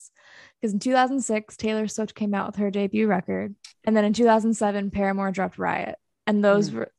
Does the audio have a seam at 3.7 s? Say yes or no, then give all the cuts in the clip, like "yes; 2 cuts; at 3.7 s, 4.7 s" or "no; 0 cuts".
yes; 1 cut; at 3.7 s